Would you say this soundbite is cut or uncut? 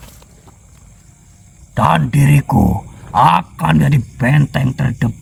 uncut